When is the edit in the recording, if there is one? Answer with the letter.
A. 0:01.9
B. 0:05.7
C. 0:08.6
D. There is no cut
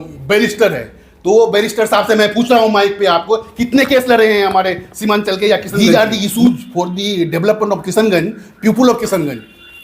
B